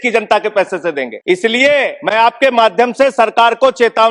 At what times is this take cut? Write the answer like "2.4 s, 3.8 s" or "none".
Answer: 1.1 s, 2.0 s